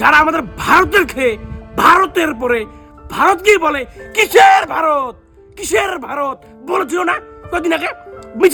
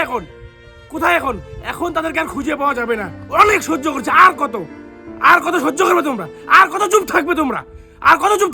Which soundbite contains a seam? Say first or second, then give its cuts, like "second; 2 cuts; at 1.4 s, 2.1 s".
second; 1 cut; at 3.2 s